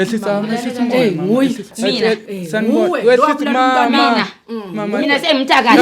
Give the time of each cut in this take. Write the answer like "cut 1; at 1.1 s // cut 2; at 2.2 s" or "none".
cut 1; at 1.7 s